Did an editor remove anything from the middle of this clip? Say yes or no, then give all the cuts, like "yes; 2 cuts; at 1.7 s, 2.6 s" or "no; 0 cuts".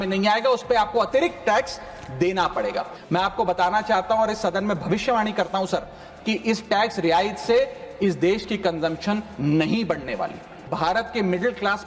yes; 2 cuts; at 3.0 s, 10.7 s